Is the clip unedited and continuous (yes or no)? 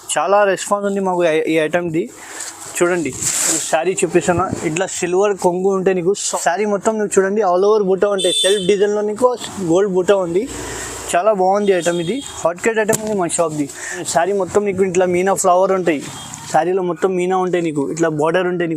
no